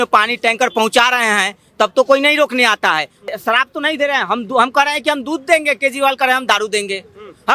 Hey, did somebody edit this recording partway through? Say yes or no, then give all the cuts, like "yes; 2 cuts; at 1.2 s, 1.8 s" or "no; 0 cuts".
yes; 1 cut; at 3.3 s